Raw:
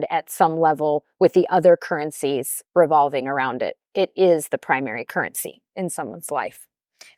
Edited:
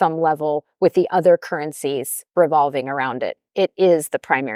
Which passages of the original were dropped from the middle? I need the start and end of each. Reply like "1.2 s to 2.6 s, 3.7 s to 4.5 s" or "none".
none

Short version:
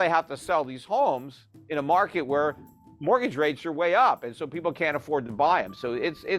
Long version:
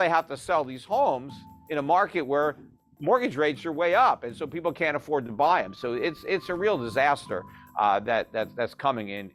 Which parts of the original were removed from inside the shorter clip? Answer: none

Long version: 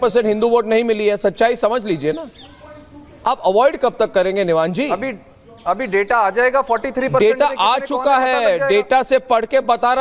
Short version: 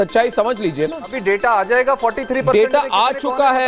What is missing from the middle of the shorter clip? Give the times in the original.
2.4 s to 5.8 s

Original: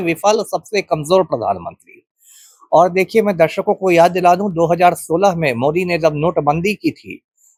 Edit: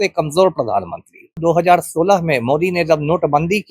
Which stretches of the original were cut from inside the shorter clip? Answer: 2.1 s to 4.5 s

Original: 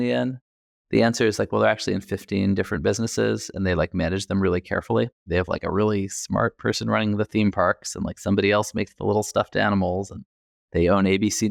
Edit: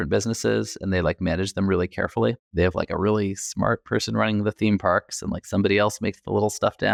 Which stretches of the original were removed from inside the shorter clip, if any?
none

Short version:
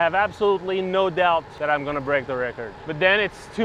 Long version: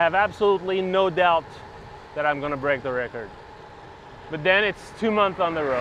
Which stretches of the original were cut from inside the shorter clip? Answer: 1.5 s to 2.1 s, 3.3 s to 4.2 s

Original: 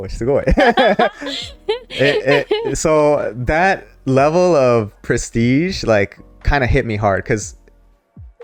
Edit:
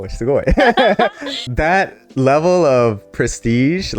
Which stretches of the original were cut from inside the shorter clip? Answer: 1.5 s to 3.4 s

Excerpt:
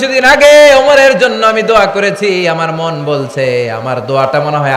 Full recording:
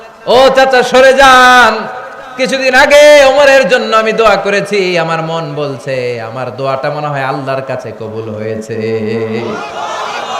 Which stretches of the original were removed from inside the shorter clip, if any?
none

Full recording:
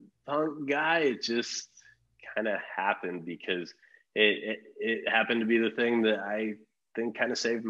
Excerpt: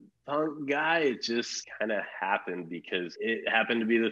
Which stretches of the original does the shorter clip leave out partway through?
1.6 s to 2.2 s, 3.7 s to 4.7 s

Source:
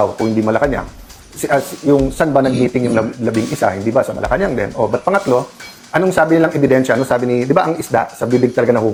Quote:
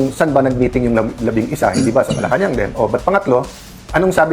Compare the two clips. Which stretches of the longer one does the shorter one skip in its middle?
none

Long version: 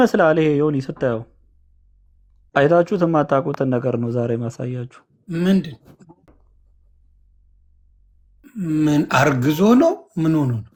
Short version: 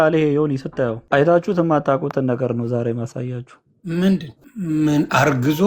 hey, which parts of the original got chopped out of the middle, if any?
1.2 s to 2.4 s, 5.8 s to 8.4 s

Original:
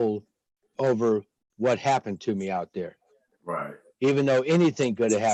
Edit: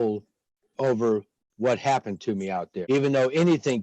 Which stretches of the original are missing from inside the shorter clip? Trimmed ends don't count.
2.8 s to 3.9 s

